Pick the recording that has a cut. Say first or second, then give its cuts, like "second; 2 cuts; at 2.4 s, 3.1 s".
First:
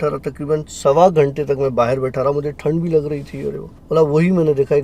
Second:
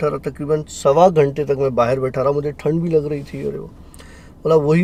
first; 1 cut; at 3.7 s